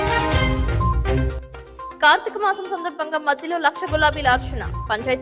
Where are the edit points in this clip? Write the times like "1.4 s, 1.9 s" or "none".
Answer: 1.0 s